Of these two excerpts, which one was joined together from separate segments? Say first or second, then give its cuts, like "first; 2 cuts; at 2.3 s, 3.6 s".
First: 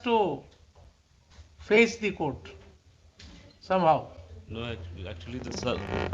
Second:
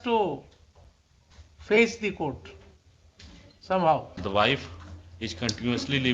second; 1 cut; at 4.1 s